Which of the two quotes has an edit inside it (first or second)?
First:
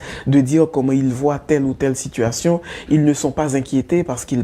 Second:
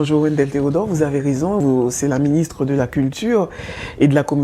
second